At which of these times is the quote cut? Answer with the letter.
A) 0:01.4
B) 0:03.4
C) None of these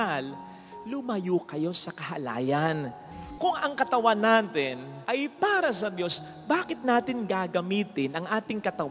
B